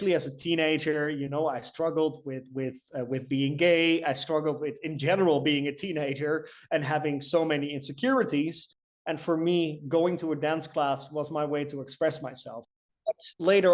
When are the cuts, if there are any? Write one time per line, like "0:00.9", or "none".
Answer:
0:12.7